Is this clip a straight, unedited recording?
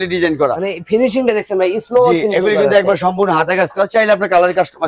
yes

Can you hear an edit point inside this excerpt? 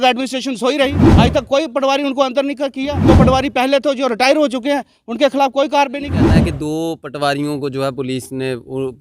yes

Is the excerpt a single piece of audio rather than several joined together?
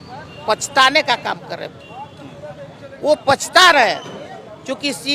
yes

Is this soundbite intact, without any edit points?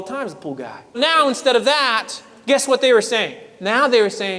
no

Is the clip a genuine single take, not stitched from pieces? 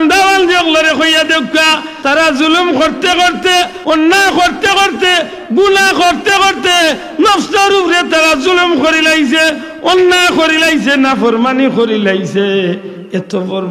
no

